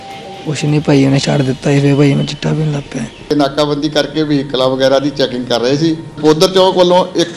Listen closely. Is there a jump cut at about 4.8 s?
no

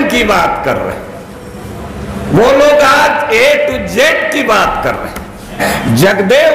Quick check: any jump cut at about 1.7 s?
no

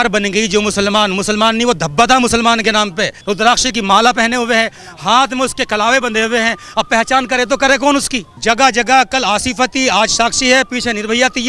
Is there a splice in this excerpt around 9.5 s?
no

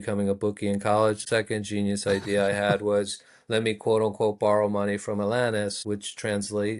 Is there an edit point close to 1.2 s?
yes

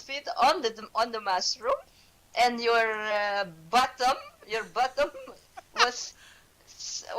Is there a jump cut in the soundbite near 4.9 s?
yes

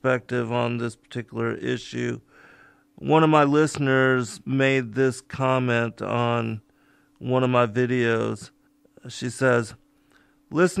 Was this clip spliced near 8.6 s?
yes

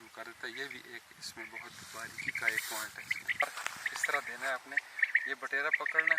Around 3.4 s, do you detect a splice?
yes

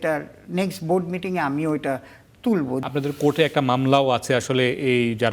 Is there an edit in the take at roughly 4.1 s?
no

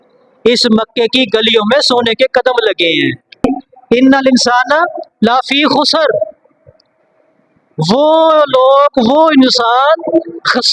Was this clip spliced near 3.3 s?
yes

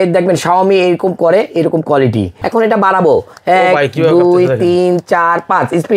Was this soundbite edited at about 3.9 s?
no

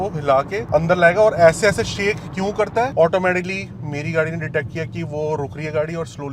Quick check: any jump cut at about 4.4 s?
no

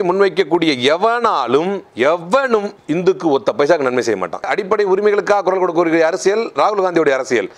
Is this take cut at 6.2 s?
no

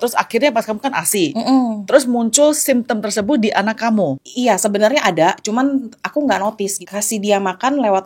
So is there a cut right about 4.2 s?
yes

